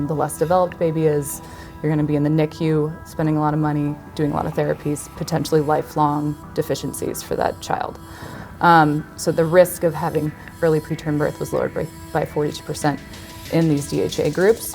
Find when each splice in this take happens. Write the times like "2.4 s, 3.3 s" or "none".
9.2 s